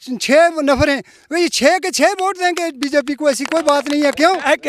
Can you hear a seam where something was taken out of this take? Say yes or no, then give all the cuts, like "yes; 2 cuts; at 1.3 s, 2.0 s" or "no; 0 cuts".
no; 0 cuts